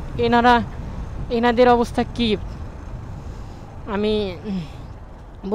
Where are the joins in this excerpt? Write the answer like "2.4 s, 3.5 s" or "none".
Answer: none